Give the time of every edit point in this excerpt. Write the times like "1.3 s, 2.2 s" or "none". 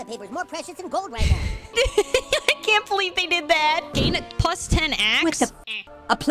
1.7 s, 4.0 s